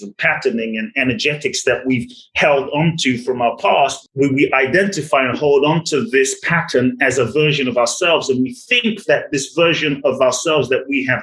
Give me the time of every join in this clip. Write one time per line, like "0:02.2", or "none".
0:04.0

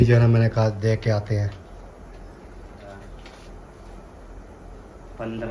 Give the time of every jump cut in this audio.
0:03.0

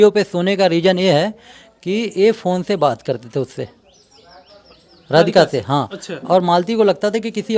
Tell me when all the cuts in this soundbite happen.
none

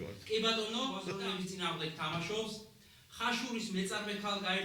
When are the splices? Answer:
0:01.1

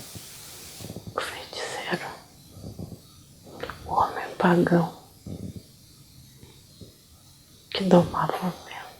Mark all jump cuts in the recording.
0:03.4
0:06.9

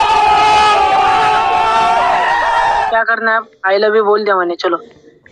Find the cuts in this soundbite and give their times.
0:02.9

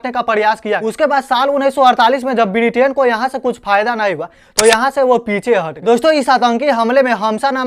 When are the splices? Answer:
0:00.8
0:05.7

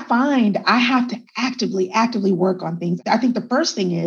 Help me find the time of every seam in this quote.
0:03.0

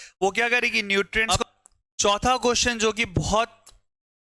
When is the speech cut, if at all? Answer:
0:01.2

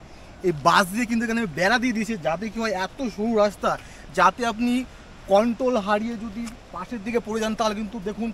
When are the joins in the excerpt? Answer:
none

